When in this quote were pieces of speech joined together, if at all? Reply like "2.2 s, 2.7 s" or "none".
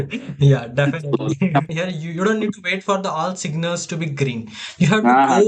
1.7 s